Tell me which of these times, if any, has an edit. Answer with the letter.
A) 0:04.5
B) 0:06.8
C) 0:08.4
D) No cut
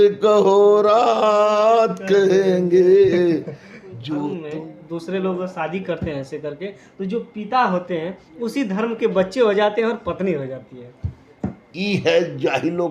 A